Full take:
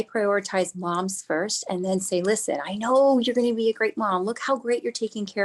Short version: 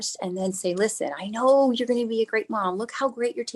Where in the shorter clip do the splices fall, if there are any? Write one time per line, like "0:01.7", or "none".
none